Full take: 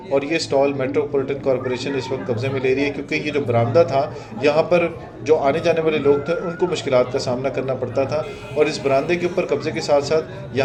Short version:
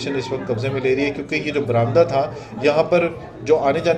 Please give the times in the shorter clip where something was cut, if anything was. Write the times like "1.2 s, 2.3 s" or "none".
none